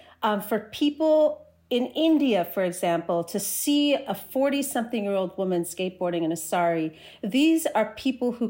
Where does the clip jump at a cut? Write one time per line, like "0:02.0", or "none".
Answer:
none